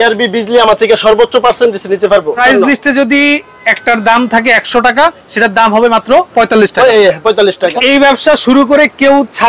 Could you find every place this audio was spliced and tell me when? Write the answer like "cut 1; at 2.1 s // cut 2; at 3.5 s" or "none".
cut 1; at 2.4 s // cut 2; at 7.7 s

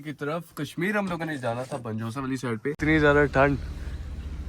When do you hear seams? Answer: cut 1; at 2.8 s

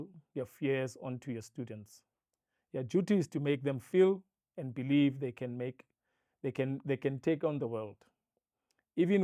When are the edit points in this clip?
none

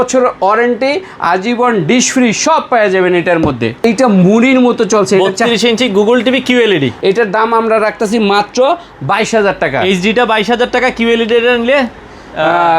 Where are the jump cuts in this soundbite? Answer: cut 1; at 3.8 s // cut 2; at 6.9 s

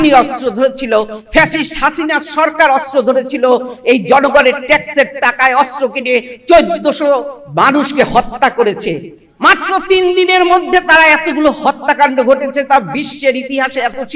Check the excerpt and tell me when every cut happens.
none

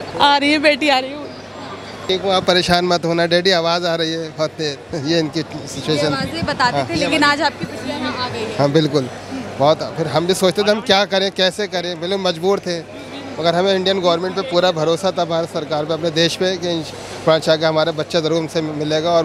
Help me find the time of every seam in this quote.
cut 1; at 2.0 s

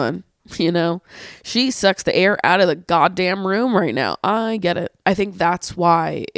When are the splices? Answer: cut 1; at 4.9 s

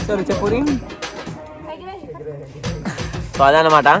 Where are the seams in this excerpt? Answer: none

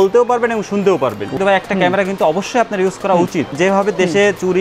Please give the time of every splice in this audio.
cut 1; at 1.3 s // cut 2; at 3.5 s

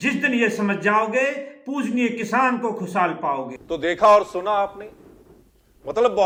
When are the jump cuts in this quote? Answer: none

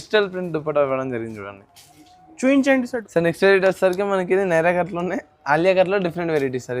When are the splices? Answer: cut 1; at 3.0 s

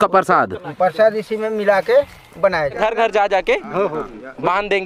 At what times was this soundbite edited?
cut 1; at 2.7 s

